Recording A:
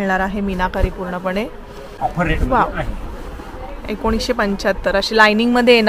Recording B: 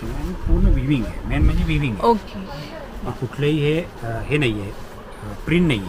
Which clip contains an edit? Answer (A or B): A